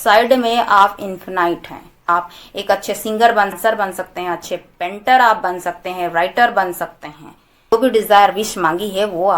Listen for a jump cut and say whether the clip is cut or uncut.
cut